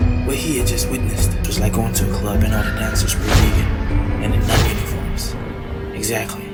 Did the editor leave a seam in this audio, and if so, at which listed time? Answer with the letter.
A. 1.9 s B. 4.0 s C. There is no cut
C